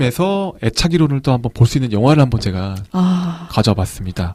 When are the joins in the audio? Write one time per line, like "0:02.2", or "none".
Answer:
none